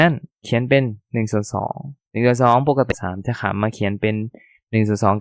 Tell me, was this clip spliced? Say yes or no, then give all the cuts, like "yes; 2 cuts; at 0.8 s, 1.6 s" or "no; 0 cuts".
yes; 1 cut; at 2.9 s